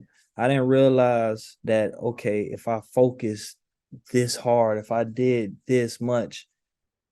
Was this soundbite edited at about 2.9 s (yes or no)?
no